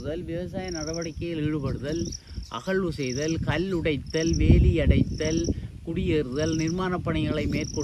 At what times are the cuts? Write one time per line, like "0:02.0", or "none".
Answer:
none

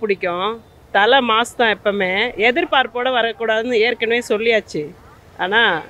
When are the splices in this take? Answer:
none

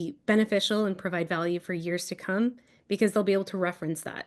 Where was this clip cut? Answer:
none

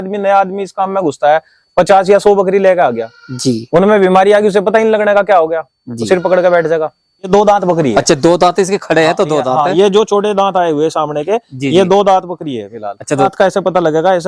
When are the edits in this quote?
0:07.3
0:13.3

